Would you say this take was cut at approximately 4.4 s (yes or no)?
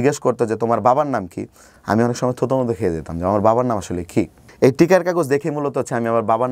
yes